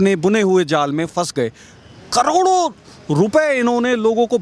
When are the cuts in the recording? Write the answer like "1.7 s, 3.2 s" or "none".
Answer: none